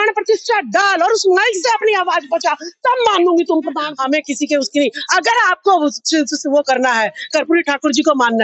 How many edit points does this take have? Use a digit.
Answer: 1